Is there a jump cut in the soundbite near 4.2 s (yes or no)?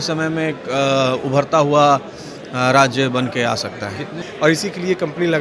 yes